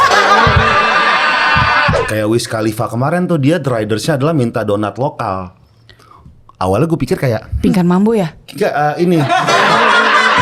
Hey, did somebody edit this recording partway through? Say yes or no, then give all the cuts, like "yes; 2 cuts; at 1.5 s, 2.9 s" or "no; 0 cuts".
yes; 1 cut; at 2.0 s